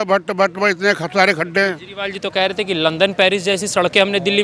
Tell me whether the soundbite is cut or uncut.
uncut